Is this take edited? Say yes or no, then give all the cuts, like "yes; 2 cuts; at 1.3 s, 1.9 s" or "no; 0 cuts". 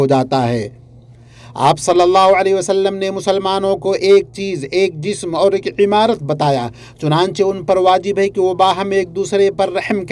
no; 0 cuts